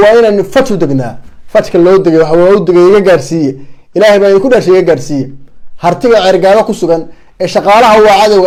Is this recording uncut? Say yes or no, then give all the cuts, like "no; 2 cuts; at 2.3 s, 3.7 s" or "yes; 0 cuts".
yes; 0 cuts